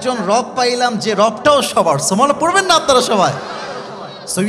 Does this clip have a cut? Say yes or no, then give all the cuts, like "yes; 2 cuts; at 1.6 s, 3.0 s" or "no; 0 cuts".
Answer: no; 0 cuts